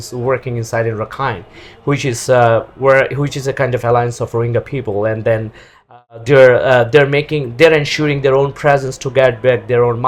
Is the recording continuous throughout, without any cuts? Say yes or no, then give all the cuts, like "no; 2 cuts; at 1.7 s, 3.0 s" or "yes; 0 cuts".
yes; 0 cuts